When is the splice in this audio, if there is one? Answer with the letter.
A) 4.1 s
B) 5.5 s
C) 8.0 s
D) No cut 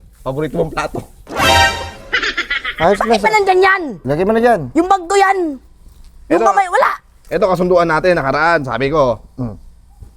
A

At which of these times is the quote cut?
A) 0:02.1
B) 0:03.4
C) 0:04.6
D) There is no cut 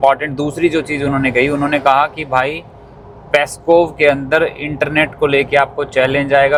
D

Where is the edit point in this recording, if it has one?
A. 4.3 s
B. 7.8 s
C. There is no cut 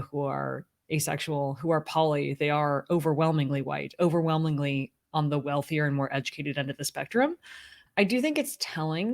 B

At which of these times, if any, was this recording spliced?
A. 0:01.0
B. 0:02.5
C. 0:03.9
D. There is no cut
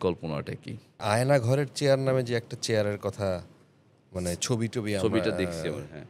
A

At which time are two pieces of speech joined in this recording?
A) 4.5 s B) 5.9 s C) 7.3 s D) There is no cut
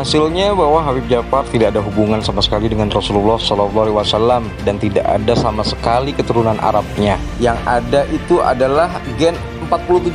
D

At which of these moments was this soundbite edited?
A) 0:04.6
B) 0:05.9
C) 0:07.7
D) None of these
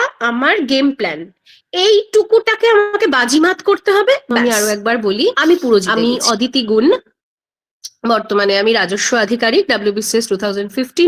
B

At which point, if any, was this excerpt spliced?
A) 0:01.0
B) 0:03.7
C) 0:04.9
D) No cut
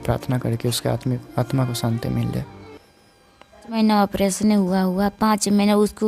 B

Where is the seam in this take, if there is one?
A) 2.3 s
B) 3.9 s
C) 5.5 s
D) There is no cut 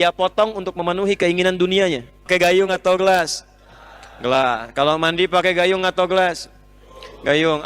A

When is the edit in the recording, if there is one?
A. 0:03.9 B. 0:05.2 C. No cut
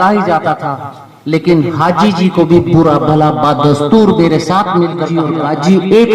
B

